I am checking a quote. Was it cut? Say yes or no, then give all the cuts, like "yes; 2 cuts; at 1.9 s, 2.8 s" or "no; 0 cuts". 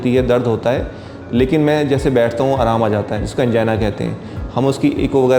no; 0 cuts